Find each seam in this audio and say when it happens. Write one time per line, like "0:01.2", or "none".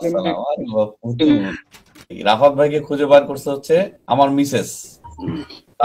0:02.1
0:04.0